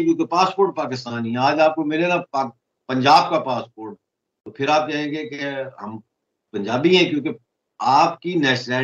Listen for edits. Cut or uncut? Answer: uncut